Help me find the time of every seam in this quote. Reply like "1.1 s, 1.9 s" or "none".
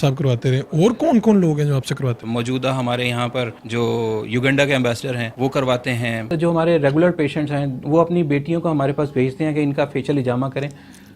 2.2 s, 3.6 s, 5.3 s, 6.3 s